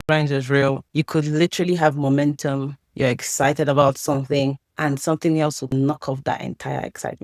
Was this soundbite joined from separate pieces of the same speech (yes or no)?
no